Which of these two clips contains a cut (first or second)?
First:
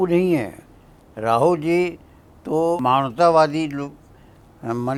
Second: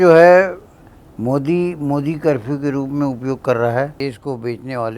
second